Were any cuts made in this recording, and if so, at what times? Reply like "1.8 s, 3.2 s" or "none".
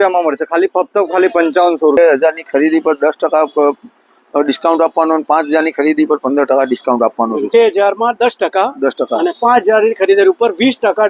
2.0 s, 7.5 s